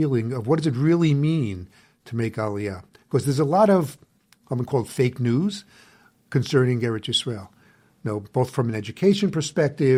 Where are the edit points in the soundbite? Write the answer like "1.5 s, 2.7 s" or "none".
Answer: none